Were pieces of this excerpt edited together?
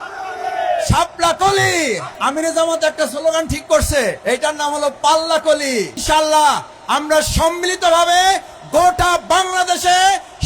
yes; 3 cuts; at 2.1 s, 4.2 s, 6.0 s

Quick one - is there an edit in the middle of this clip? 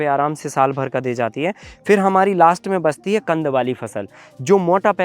no; 0 cuts

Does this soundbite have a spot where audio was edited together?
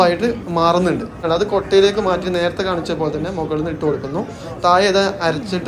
yes; 1 cut; at 1.2 s

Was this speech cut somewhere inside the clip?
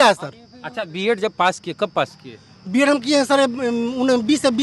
no; 0 cuts

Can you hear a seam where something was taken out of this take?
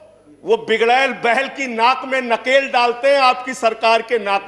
no; 0 cuts

